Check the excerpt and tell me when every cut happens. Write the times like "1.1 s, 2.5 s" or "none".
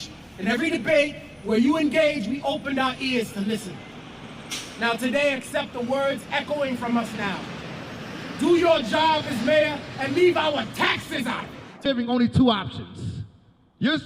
11.9 s